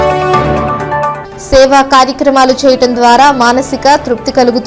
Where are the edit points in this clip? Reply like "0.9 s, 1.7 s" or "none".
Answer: none